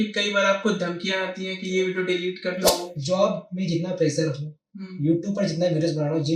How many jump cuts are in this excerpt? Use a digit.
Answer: 1